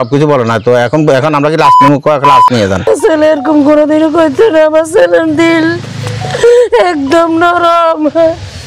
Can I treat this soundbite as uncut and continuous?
no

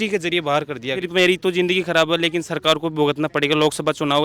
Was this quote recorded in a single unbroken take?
no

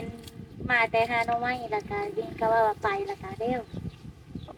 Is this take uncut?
yes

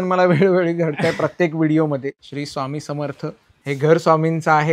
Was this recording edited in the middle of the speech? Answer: yes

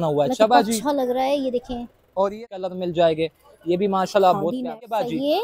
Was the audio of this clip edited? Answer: yes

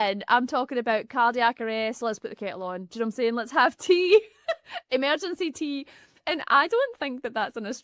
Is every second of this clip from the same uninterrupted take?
yes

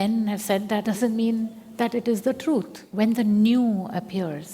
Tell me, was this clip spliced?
yes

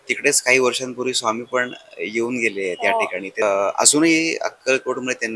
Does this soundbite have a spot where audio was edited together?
yes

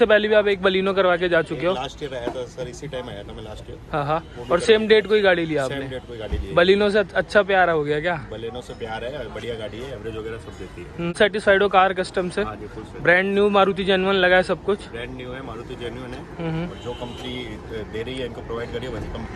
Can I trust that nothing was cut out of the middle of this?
no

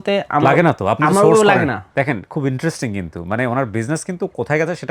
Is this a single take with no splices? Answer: yes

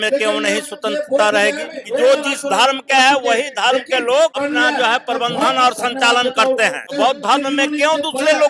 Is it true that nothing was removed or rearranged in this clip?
no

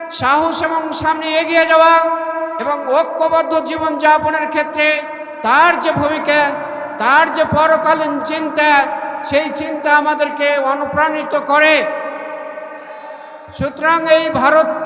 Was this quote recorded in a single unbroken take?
yes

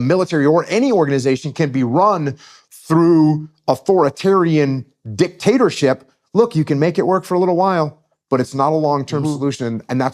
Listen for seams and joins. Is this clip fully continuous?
yes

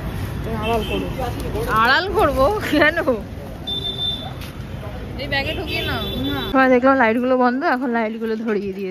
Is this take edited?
no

